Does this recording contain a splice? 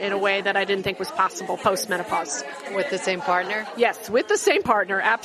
no; 0 cuts

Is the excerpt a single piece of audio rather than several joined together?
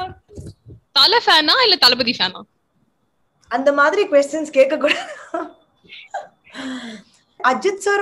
yes; 0 cuts

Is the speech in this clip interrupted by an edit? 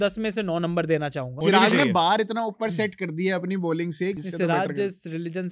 yes; 2 cuts; at 1.4 s, 4.2 s

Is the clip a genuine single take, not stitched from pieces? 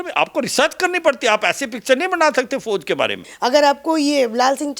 no; 1 cut; at 3.2 s

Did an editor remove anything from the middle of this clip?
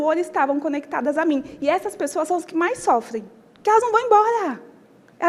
no; 0 cuts

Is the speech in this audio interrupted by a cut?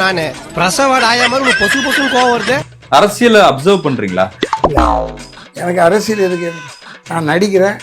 yes; 1 cut; at 2.7 s

